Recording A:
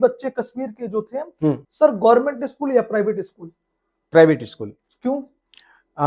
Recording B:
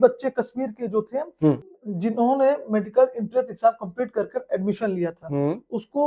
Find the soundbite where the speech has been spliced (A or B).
A